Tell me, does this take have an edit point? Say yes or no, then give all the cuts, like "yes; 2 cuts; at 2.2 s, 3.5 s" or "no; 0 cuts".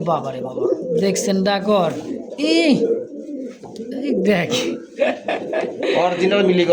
no; 0 cuts